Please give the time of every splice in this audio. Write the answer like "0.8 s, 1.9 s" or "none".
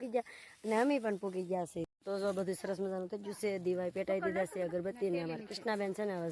1.9 s

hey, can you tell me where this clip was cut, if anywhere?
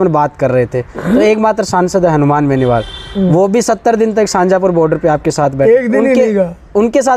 none

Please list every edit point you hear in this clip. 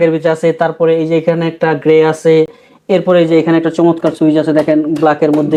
none

